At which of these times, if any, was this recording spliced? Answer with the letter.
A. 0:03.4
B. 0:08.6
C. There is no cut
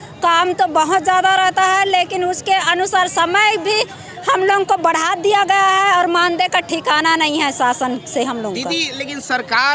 C